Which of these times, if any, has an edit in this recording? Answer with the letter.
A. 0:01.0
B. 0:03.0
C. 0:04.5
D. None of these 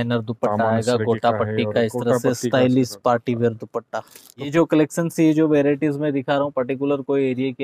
C